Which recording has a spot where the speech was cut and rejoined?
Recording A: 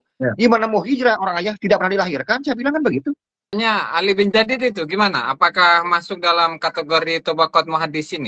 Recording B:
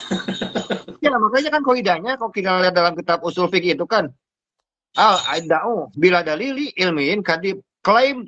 A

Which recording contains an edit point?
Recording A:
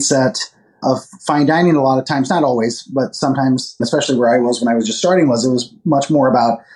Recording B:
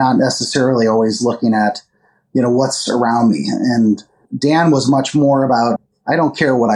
B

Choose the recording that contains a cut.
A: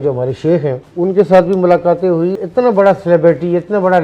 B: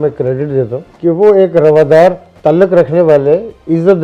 A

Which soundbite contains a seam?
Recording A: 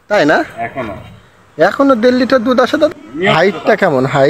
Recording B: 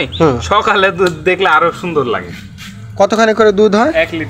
A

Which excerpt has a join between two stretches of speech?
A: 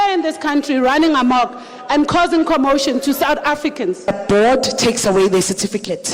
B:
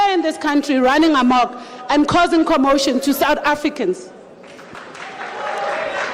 A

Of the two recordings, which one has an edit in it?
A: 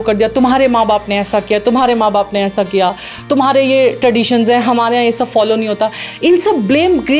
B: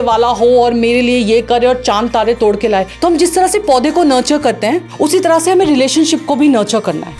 B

